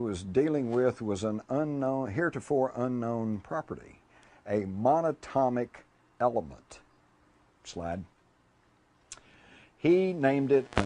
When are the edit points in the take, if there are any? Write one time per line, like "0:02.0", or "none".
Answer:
0:03.2